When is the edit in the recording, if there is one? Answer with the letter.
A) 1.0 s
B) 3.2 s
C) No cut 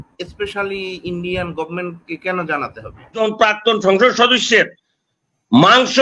B